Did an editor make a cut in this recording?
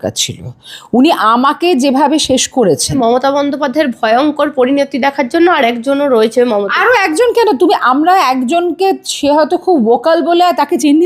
yes; 1 cut; at 3.0 s

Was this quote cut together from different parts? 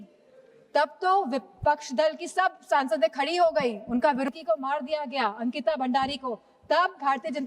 yes; 1 cut; at 4.3 s

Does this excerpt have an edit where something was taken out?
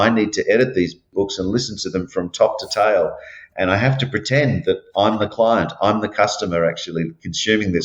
no; 0 cuts

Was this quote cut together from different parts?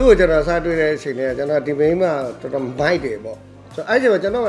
no; 0 cuts

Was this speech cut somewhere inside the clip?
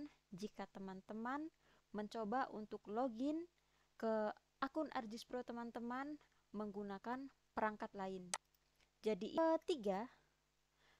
yes; 1 cut; at 9.4 s

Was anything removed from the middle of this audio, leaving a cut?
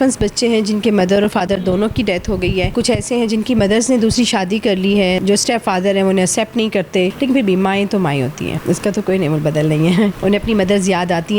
yes; 5 cuts; at 2.7 s, 5.2 s, 7.1 s, 8.6 s, 10.2 s

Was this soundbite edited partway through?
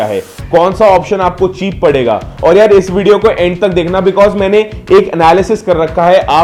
no; 0 cuts

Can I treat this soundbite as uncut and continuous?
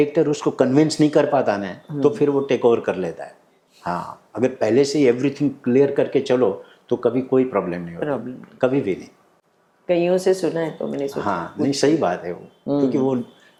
yes; 0 cuts

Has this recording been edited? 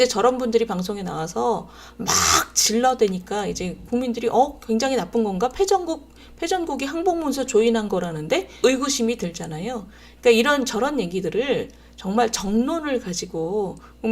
yes; 1 cut; at 8.6 s

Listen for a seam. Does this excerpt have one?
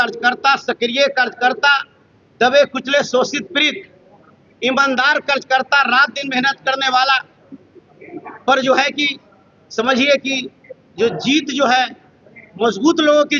no; 0 cuts

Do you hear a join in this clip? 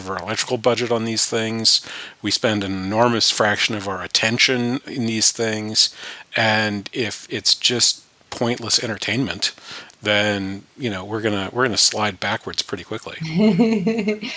no; 0 cuts

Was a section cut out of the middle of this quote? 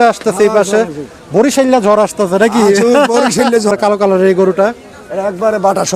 yes; 1 cut; at 3.7 s

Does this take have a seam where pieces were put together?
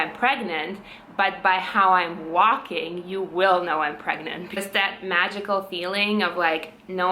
yes; 1 cut; at 4.6 s

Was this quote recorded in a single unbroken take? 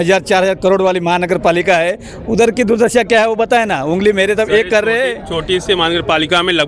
yes; 0 cuts

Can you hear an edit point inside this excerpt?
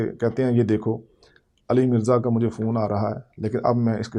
no; 0 cuts

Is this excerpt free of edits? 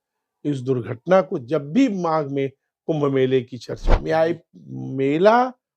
no; 1 cut; at 4.0 s

